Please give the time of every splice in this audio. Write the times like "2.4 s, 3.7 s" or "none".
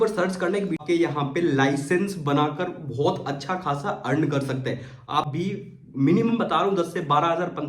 0.8 s, 5.3 s

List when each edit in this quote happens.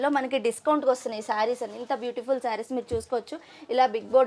none

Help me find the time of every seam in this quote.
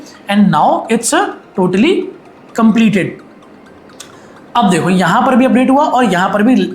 none

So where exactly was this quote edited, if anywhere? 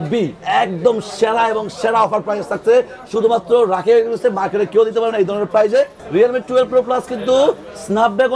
6.0 s

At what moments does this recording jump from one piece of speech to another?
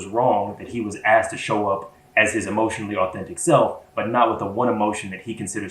none

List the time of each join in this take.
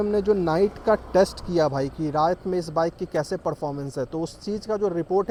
none

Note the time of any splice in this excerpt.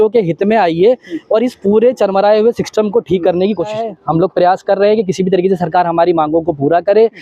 3.9 s

